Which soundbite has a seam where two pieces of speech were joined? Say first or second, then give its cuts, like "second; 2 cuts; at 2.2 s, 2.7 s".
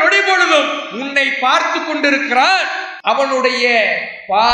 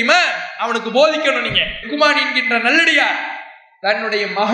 first; 1 cut; at 2.8 s